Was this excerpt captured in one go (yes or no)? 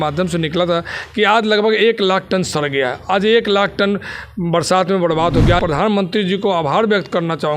no